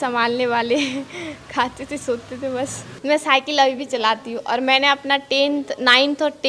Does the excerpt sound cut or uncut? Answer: cut